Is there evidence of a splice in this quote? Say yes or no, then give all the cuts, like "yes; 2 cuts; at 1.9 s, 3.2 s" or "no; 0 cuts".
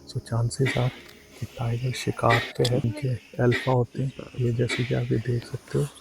yes; 1 cut; at 2.9 s